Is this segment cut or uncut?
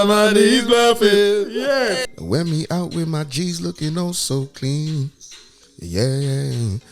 cut